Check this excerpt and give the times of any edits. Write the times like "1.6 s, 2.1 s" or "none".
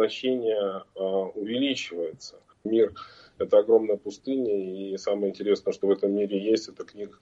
2.7 s

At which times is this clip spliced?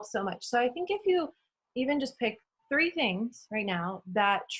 none

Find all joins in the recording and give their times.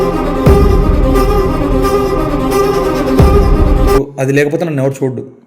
4.0 s

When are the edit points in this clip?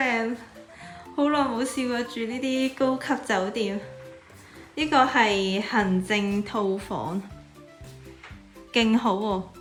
none

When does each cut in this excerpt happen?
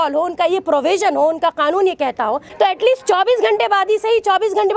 2.5 s

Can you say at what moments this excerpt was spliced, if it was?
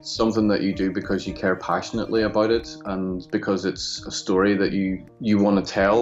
5.1 s

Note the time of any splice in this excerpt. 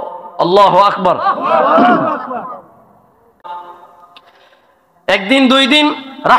3.5 s

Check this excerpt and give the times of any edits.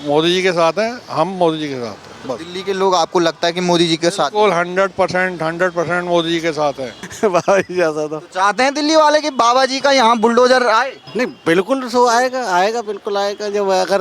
7.0 s, 11.0 s

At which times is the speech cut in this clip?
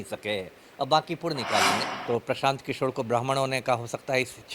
1.7 s

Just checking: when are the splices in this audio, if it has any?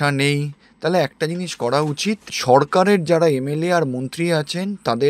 2.3 s

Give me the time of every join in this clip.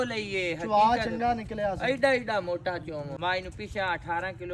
3.1 s

